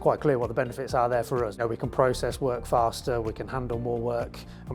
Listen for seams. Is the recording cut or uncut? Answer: cut